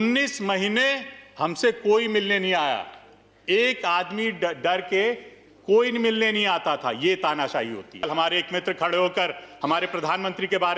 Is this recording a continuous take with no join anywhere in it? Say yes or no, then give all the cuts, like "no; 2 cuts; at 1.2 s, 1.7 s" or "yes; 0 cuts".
no; 1 cut; at 8.1 s